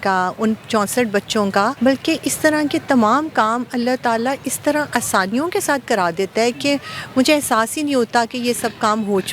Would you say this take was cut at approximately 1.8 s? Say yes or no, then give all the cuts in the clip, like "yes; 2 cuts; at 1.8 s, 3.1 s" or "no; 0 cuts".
yes; 1 cut; at 1.8 s